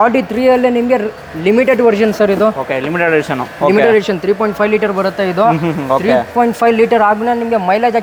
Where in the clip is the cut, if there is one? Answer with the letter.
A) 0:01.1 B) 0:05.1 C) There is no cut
C